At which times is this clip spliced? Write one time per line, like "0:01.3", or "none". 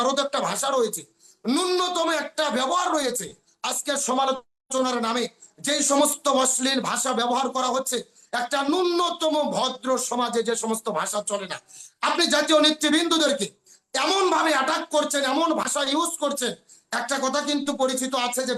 none